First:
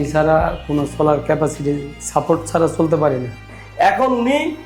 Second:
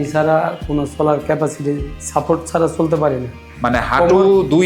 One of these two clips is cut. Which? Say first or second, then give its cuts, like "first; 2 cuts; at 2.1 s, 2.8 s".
first; 1 cut; at 3.5 s